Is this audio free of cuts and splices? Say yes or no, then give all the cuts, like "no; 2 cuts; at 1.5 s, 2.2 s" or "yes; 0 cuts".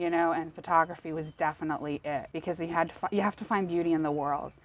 no; 1 cut; at 2.3 s